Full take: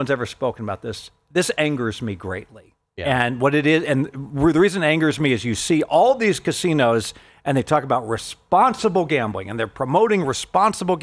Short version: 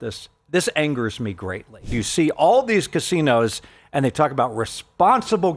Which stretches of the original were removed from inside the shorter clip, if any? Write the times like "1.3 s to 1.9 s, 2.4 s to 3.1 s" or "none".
2.8 s to 5.5 s

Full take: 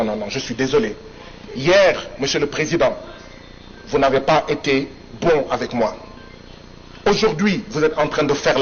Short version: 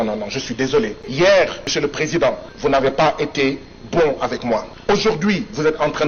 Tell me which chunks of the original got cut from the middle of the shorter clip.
1.0 s to 1.5 s, 2.1 s to 2.2 s, 3.1 s to 3.8 s, 6.0 s to 6.9 s

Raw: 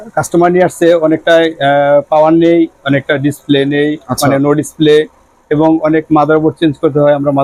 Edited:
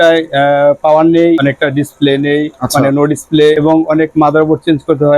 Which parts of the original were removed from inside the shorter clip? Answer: 2.7 s to 2.9 s, 5.1 s to 5.5 s

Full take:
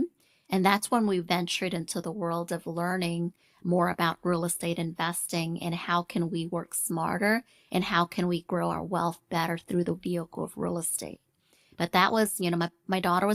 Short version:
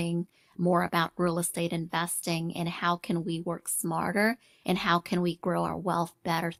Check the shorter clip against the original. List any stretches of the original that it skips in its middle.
none

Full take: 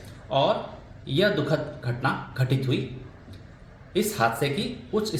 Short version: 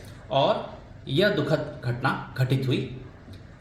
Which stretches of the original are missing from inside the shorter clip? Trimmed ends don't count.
none

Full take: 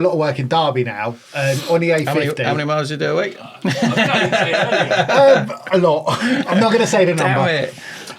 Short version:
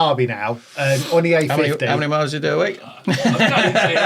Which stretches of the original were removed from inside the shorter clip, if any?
none

